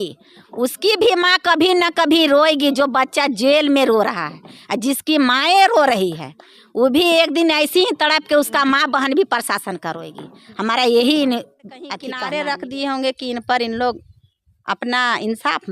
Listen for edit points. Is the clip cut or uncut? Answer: cut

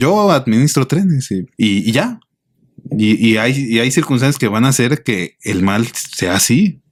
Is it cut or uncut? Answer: uncut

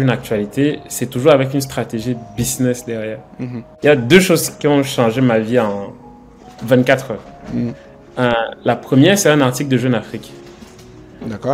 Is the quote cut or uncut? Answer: cut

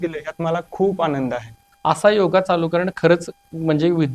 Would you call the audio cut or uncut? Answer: cut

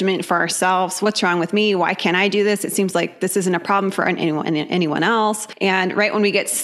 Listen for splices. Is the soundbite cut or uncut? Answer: cut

